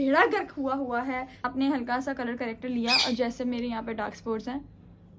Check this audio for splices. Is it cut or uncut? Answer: cut